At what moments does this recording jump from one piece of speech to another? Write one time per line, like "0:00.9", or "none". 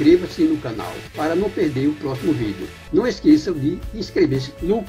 0:01.0